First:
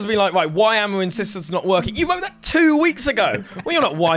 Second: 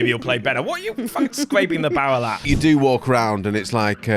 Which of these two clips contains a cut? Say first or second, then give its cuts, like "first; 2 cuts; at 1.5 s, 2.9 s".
second; 1 cut; at 2.5 s